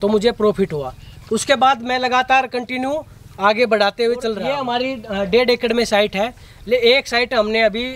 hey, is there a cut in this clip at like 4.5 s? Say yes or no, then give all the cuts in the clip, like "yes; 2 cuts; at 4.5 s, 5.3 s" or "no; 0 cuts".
yes; 1 cut; at 4.5 s